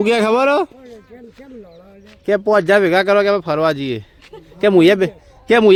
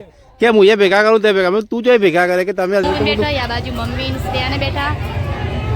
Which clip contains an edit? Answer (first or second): second